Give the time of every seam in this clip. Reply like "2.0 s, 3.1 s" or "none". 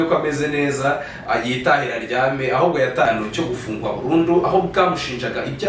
3.1 s